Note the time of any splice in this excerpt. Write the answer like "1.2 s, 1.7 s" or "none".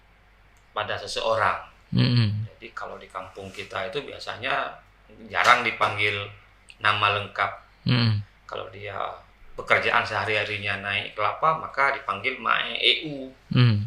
9.3 s